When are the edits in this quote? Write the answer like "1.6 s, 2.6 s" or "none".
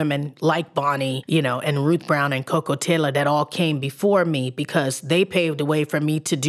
none